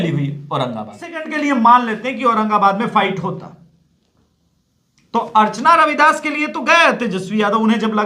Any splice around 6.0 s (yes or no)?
no